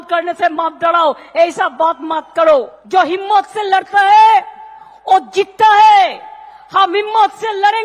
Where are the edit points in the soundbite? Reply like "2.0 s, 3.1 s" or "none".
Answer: 2.8 s